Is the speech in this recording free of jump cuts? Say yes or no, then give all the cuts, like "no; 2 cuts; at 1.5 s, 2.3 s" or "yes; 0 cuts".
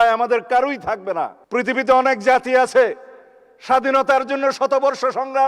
no; 1 cut; at 1.4 s